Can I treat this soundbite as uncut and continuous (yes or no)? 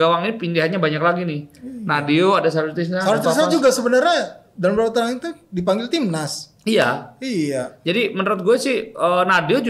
yes